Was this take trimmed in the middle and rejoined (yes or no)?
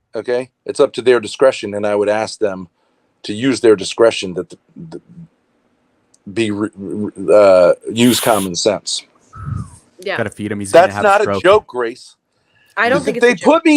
no